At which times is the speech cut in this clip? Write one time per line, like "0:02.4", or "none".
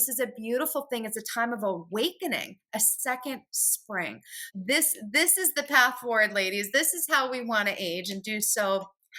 0:04.4

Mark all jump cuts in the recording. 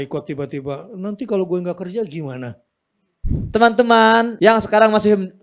0:03.4
0:04.3

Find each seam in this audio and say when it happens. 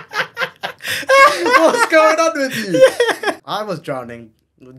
0:03.3

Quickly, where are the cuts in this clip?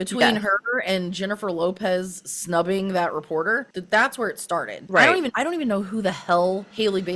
0:03.7
0:04.8
0:05.3

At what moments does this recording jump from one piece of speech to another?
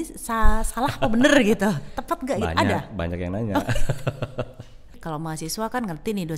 0:05.0

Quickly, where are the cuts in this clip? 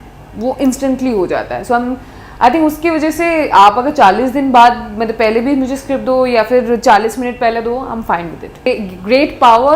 0:08.7

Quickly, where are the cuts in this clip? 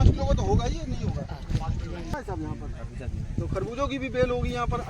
0:02.1

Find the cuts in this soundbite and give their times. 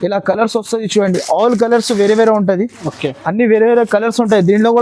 none

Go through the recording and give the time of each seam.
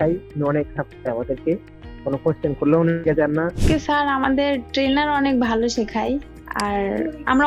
0:03.6

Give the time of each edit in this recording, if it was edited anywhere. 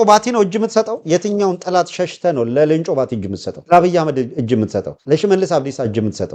none

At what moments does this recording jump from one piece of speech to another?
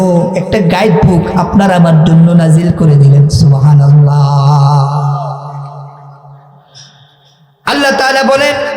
none

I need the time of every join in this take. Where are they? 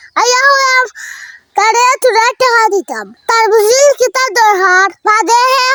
none

